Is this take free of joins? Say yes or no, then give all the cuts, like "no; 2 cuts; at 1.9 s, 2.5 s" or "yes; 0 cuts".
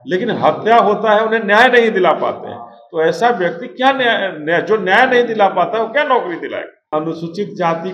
no; 1 cut; at 6.9 s